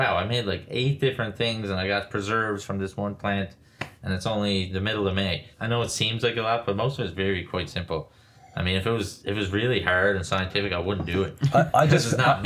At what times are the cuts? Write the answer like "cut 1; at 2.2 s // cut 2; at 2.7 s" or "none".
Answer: cut 1; at 5.5 s